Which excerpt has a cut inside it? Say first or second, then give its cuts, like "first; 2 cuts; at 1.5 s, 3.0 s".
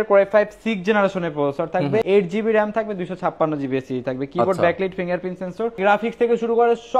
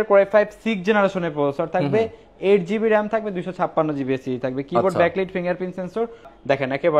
first; 2 cuts; at 2.0 s, 5.8 s